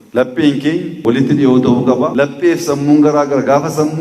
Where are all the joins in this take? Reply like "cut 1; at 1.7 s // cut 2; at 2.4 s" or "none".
cut 1; at 0.9 s // cut 2; at 2.1 s